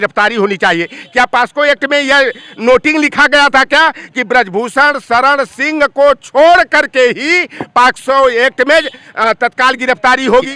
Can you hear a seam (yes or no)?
no